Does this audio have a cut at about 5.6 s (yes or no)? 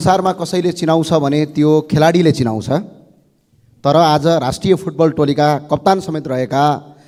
no